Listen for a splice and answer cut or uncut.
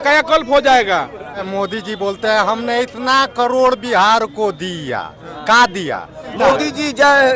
cut